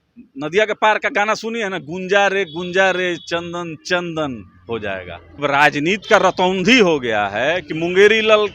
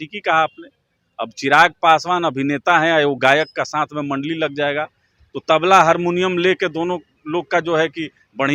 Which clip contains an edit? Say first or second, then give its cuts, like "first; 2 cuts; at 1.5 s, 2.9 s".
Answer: first; 1 cut; at 5.4 s